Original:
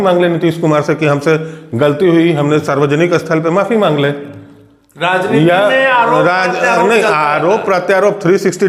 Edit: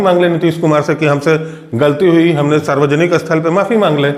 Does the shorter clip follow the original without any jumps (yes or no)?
yes